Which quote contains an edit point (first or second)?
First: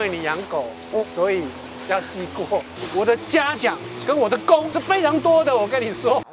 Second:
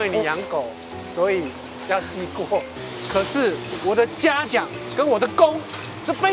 first